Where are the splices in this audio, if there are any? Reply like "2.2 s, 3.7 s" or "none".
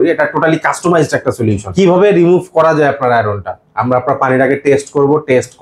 1.6 s